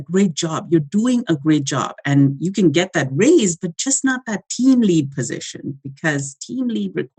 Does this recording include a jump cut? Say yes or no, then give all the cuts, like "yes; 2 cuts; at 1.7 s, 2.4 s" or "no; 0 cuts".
no; 0 cuts